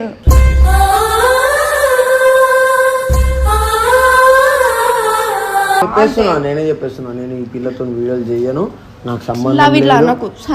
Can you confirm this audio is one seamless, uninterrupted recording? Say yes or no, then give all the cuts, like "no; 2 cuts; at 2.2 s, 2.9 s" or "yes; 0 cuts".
no; 1 cut; at 5.9 s